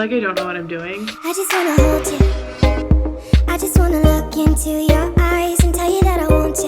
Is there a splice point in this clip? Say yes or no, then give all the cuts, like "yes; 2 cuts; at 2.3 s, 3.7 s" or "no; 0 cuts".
yes; 1 cut; at 1.1 s